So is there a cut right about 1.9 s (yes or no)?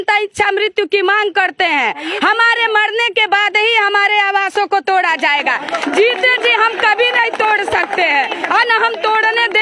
no